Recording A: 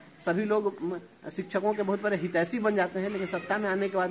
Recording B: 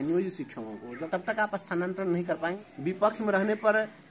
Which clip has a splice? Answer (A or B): B